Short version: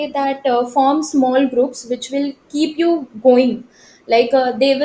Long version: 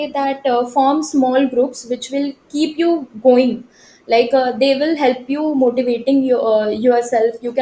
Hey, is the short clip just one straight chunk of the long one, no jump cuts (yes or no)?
yes